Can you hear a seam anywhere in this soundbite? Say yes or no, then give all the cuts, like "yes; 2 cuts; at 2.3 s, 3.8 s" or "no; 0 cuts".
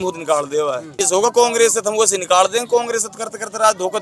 yes; 1 cut; at 1.0 s